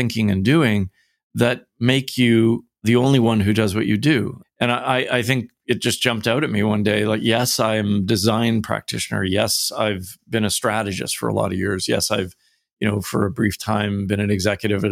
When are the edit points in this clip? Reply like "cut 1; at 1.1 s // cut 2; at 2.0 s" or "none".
cut 1; at 2.8 s // cut 2; at 4.4 s